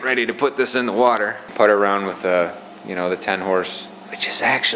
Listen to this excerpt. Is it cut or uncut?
cut